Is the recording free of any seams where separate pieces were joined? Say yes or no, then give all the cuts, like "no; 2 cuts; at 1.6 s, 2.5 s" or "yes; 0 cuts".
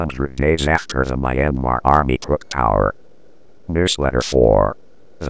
no; 1 cut; at 3.6 s